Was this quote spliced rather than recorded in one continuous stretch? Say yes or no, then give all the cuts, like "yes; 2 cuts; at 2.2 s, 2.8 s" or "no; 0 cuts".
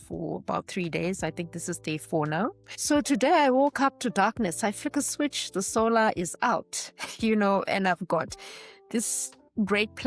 yes; 1 cut; at 2.7 s